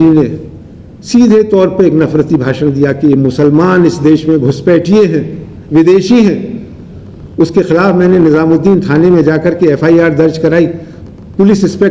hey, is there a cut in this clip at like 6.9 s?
no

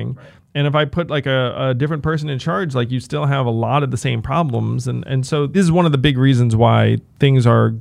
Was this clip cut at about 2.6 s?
no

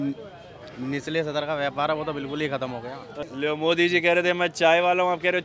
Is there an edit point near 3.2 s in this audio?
yes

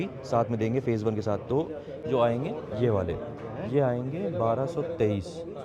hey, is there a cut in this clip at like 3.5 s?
no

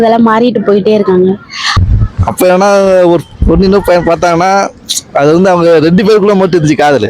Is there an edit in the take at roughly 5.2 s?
no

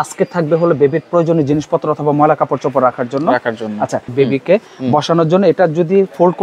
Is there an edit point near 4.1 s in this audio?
yes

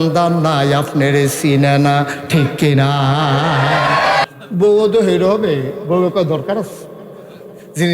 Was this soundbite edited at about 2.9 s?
no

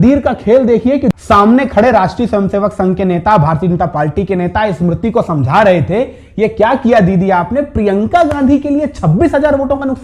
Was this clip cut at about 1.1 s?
yes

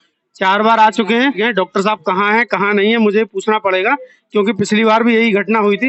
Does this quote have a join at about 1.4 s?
no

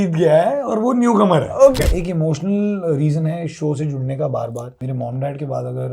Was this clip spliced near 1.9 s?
yes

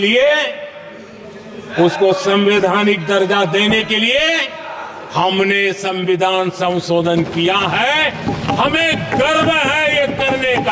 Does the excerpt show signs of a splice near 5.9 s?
no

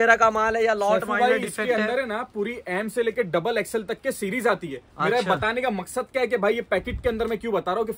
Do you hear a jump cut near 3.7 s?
no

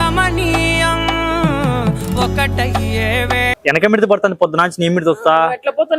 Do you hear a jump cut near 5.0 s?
no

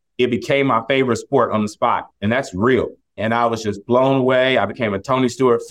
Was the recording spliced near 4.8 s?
no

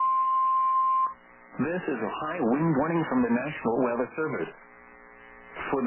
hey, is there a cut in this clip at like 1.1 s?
yes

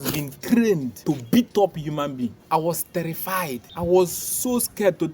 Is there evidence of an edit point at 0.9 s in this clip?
yes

